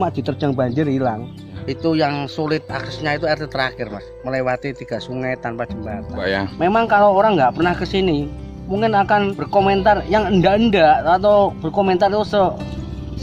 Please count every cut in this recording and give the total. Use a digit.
3